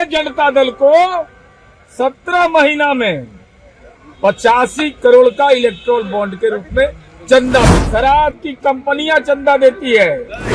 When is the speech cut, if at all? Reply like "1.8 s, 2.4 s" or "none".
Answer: 7.8 s

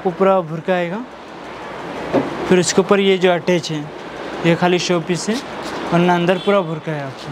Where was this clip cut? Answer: none

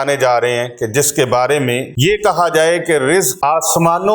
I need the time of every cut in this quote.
1.9 s, 3.3 s

